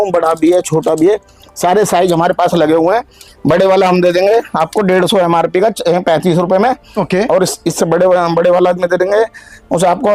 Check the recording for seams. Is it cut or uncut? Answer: uncut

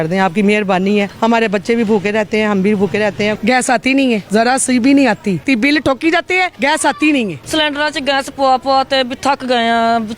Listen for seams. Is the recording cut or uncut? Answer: cut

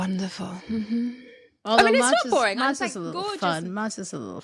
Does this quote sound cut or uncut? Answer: uncut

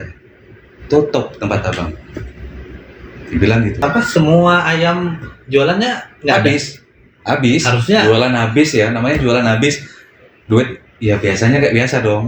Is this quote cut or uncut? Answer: cut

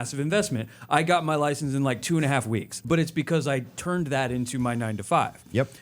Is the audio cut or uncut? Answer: cut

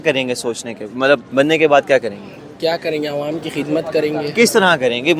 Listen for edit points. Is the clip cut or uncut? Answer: uncut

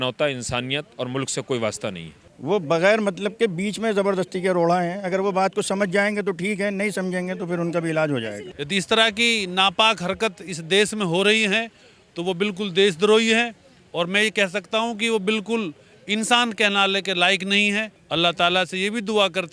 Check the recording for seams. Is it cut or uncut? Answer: cut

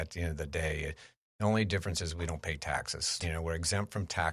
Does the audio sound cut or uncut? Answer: cut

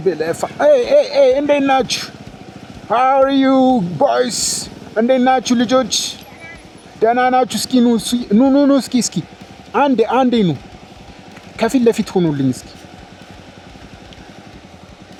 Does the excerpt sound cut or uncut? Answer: uncut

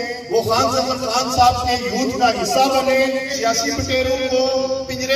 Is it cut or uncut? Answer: cut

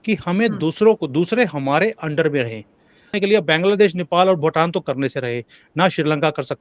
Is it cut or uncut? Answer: cut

